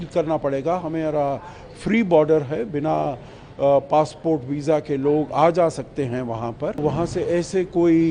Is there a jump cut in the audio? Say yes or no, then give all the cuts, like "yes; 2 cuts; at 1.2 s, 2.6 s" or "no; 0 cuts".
yes; 1 cut; at 6.8 s